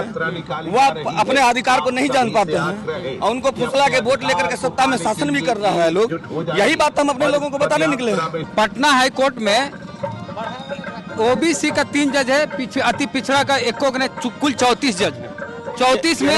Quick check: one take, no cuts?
no; 1 cut; at 8.4 s

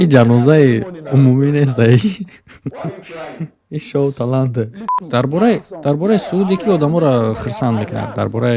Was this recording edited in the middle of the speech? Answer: yes; 1 cut; at 4.9 s

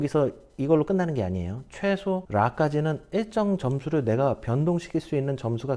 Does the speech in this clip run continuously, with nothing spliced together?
no; 1 cut; at 2.2 s

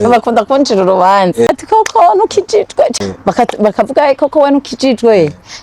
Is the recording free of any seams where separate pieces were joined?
no; 2 cuts; at 1.5 s, 3.0 s

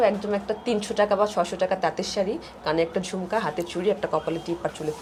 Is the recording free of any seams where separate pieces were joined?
yes; 0 cuts

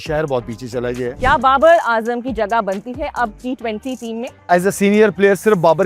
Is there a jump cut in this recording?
yes; 2 cuts; at 1.1 s, 4.5 s

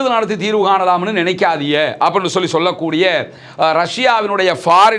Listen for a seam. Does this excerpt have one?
no; 0 cuts

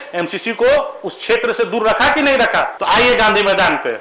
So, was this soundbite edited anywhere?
yes; 1 cut; at 2.8 s

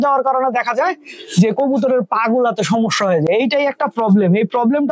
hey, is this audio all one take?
yes; 0 cuts

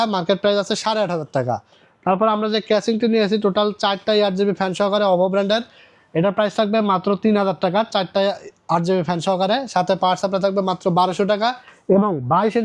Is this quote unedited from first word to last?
yes; 0 cuts

